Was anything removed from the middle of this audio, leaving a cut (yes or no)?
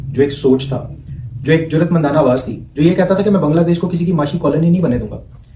no